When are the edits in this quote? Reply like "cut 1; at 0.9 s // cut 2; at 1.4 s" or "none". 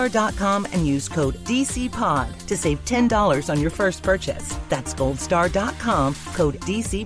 none